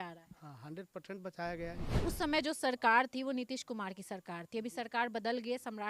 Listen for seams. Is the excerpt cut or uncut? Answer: cut